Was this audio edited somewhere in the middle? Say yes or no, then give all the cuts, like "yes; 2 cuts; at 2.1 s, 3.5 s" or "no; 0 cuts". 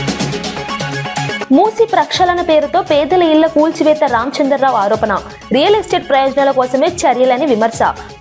no; 0 cuts